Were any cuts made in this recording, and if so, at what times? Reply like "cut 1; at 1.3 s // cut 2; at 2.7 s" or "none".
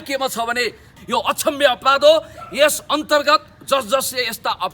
cut 1; at 0.9 s